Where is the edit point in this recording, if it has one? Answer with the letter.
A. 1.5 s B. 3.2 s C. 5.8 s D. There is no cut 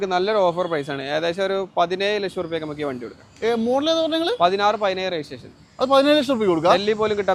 D